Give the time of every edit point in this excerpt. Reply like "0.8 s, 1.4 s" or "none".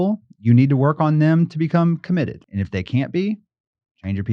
2.4 s